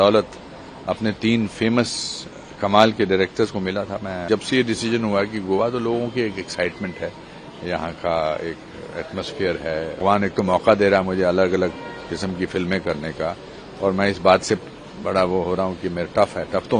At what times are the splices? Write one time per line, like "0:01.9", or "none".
0:04.2
0:09.9